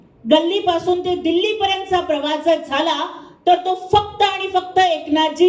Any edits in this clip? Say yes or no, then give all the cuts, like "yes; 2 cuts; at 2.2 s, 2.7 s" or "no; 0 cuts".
no; 0 cuts